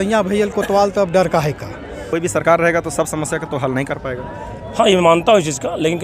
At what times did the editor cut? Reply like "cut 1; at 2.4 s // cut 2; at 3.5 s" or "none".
cut 1; at 2.0 s